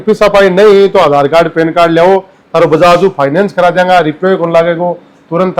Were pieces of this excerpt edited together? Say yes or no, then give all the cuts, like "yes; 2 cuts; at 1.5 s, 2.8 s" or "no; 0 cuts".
no; 0 cuts